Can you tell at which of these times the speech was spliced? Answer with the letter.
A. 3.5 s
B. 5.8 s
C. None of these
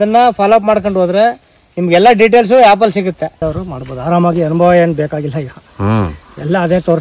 A